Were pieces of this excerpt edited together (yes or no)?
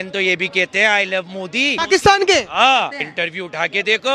yes